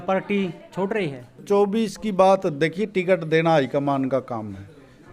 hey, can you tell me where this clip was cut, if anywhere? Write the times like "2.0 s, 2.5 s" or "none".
1.4 s